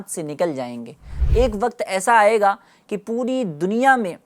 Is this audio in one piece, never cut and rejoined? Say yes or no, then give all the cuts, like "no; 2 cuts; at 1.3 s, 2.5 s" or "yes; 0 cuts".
no; 1 cut; at 1.1 s